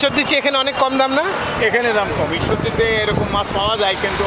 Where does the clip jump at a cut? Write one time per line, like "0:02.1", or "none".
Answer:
none